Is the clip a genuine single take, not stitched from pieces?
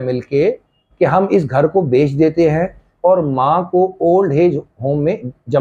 yes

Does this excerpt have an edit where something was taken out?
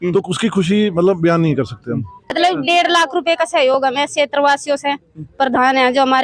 yes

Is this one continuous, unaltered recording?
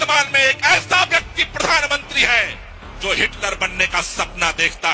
yes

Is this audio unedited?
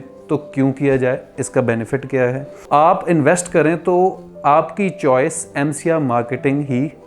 no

